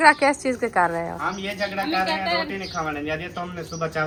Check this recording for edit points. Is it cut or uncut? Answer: uncut